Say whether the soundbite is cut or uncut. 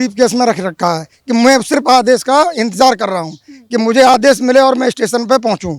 uncut